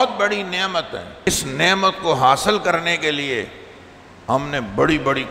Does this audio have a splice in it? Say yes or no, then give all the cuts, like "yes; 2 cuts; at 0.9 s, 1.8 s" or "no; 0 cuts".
yes; 1 cut; at 1.3 s